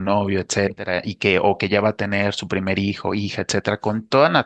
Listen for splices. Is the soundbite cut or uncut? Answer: uncut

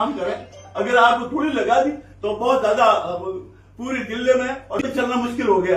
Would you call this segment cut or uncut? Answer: cut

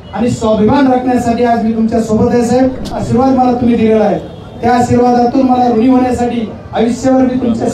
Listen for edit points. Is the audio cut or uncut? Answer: cut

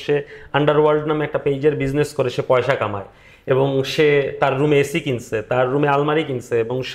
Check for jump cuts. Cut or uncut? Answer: uncut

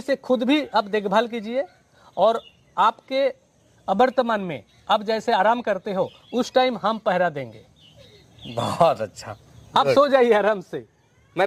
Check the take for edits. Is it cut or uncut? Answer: uncut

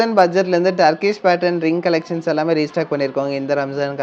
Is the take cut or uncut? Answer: uncut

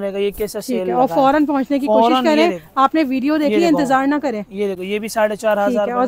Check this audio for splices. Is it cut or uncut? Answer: uncut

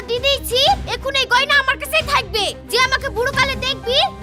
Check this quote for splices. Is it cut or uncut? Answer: uncut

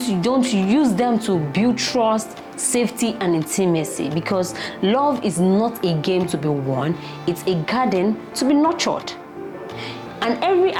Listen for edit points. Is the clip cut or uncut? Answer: uncut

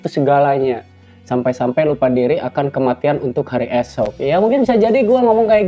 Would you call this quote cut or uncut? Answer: uncut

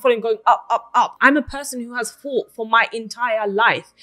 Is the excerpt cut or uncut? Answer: cut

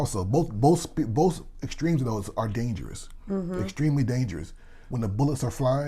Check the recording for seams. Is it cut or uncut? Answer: cut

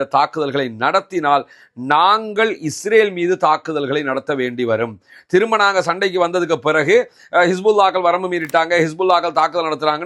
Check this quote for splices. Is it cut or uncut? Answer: uncut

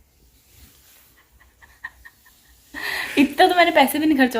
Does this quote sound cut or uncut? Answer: uncut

